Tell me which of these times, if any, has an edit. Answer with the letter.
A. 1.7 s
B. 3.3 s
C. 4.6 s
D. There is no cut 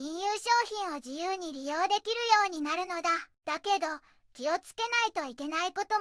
B